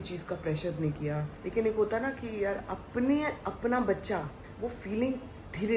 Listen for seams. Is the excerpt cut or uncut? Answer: cut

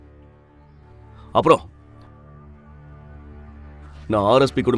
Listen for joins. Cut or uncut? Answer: uncut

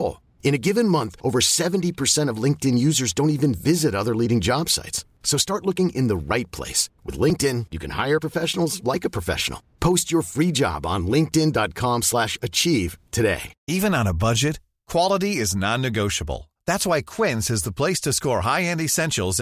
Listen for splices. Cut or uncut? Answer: cut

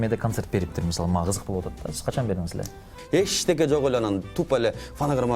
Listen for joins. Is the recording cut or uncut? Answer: cut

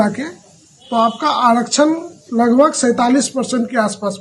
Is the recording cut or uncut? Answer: uncut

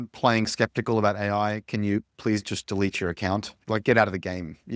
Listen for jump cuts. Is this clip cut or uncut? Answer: cut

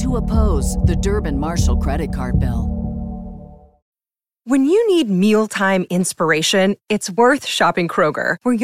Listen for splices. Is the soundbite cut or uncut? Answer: cut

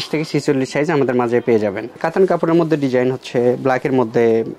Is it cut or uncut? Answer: uncut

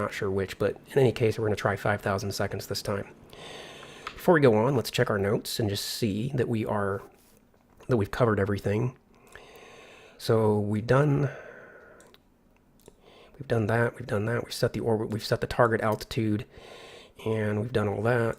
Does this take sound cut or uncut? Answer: cut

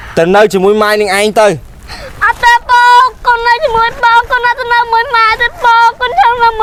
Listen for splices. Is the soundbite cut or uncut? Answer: uncut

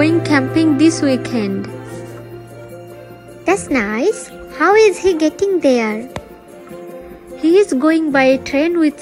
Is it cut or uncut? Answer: cut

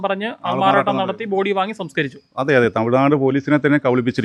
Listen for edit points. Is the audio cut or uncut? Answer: uncut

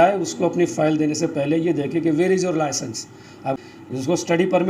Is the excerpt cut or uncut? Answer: cut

